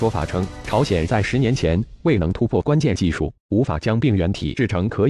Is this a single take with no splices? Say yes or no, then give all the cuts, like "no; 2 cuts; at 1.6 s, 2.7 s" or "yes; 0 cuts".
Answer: no; 1 cut; at 3.3 s